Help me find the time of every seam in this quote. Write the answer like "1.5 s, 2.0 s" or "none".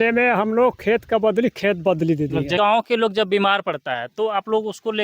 2.6 s